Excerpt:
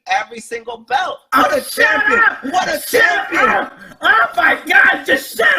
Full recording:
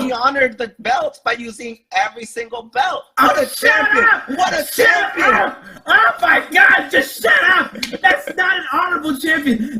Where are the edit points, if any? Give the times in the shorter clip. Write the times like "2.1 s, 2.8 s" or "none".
none